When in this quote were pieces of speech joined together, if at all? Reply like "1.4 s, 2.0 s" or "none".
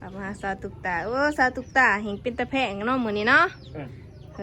none